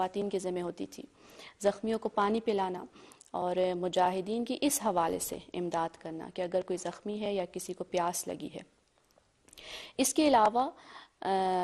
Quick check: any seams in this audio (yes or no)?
no